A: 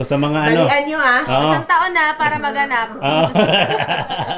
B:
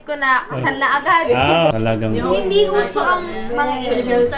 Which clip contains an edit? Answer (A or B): B